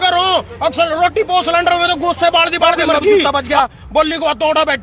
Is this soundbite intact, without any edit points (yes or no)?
no